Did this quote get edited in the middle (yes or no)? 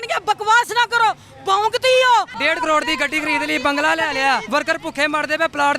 yes